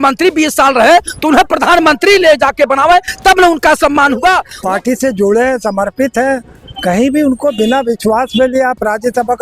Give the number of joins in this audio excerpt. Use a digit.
1